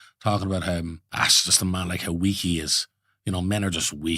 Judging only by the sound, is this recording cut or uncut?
cut